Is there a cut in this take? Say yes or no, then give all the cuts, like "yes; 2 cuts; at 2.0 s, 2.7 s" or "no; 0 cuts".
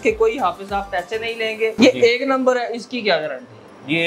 yes; 1 cut; at 1.7 s